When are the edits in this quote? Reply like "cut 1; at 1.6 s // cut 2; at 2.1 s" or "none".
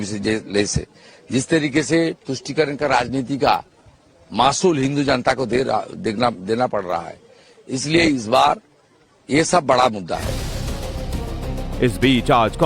cut 1; at 6.7 s

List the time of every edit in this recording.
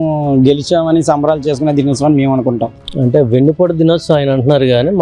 cut 1; at 2.8 s

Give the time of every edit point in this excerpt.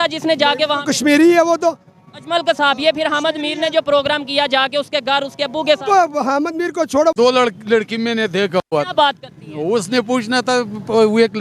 cut 1; at 7.1 s

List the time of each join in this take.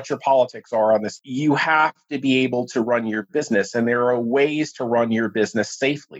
cut 1; at 1.2 s

